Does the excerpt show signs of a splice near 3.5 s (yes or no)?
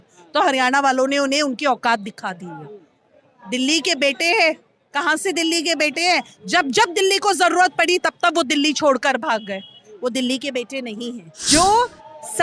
no